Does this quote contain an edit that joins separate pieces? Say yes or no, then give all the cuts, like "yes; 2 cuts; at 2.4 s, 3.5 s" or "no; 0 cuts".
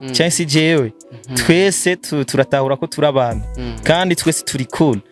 no; 0 cuts